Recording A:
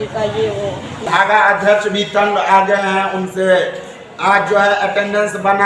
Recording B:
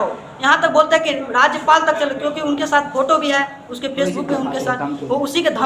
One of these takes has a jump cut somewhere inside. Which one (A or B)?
A